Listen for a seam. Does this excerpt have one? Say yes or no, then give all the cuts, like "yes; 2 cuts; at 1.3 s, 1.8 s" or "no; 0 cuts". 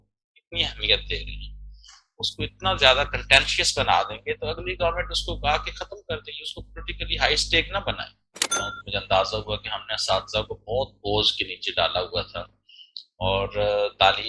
yes; 1 cut; at 8.6 s